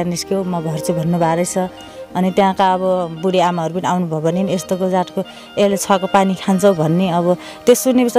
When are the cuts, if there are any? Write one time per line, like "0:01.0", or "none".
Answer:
none